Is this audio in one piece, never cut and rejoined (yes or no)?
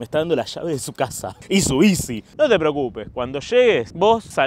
no